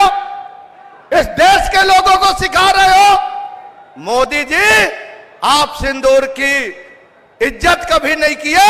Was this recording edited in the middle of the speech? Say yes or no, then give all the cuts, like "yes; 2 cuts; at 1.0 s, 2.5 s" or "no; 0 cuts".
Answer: no; 0 cuts